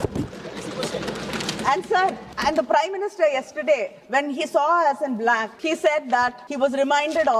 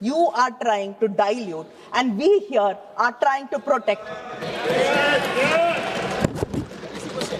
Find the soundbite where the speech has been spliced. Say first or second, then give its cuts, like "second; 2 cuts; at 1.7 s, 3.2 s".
first; 3 cuts; at 2.3 s, 5.5 s, 6.4 s